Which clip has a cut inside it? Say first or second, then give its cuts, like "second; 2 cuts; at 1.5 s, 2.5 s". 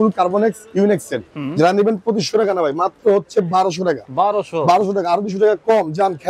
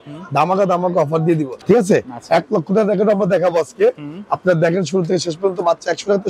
second; 1 cut; at 1.6 s